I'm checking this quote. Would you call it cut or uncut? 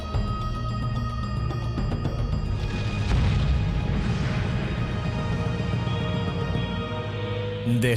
cut